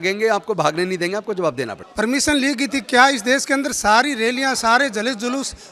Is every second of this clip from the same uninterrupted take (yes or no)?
yes